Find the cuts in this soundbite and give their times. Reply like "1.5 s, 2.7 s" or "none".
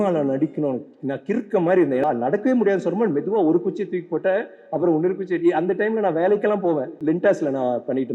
2.0 s, 6.9 s